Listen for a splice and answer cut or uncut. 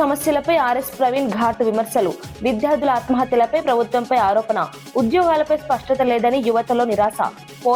uncut